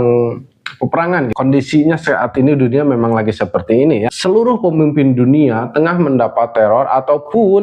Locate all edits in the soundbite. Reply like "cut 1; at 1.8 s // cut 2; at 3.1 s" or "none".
cut 1; at 1.3 s // cut 2; at 4.2 s